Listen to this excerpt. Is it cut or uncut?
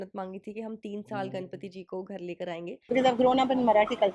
cut